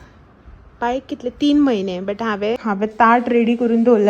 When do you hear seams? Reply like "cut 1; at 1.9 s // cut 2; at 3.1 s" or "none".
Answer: cut 1; at 2.6 s

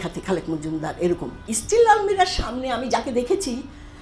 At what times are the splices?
cut 1; at 1.5 s

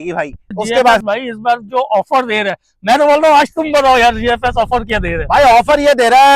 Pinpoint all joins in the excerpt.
cut 1; at 1.0 s

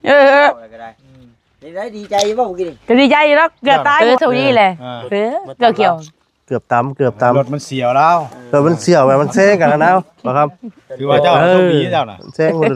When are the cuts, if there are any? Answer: cut 1; at 4.0 s

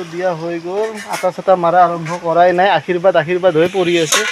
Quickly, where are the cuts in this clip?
none

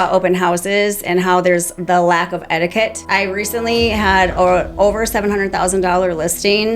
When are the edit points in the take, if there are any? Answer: cut 1; at 3.0 s

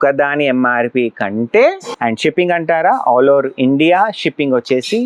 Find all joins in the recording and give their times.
cut 1; at 1.9 s

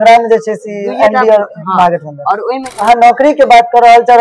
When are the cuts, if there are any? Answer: cut 1; at 2.7 s

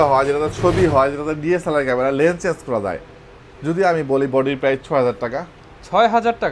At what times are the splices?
none

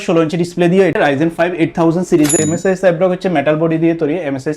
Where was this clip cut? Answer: cut 1; at 1.0 s // cut 2; at 2.4 s

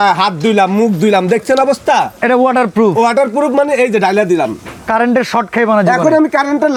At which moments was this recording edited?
none

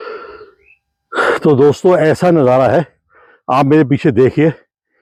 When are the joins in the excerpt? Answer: none

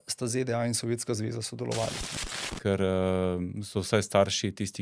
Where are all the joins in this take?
cut 1; at 2.1 s

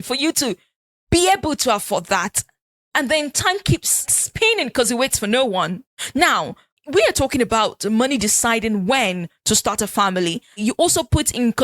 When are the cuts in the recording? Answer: cut 1; at 4.2 s // cut 2; at 10.6 s

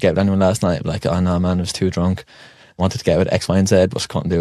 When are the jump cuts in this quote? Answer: cut 1; at 2.8 s

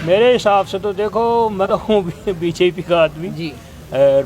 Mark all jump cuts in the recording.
cut 1; at 1.6 s

